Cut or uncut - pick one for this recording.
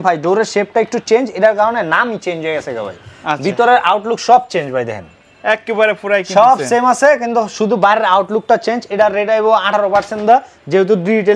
uncut